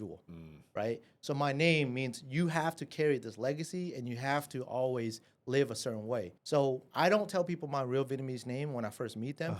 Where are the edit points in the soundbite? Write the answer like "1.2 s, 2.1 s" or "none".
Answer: 6.3 s